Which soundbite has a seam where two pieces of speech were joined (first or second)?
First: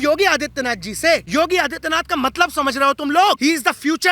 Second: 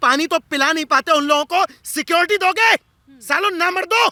first